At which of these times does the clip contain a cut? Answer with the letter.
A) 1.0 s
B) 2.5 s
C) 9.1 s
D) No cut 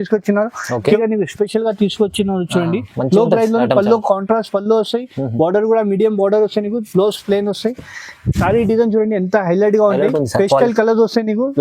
A